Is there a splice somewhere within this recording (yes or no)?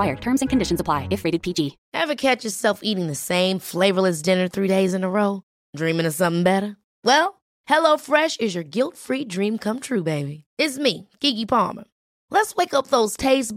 yes